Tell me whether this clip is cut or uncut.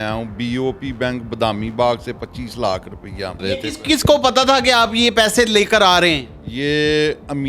cut